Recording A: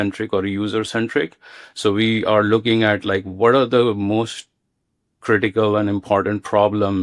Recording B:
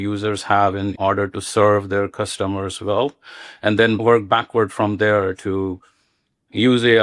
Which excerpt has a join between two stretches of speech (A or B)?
B